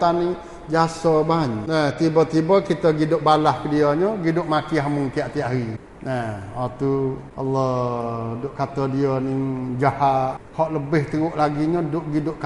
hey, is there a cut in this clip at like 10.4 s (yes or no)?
yes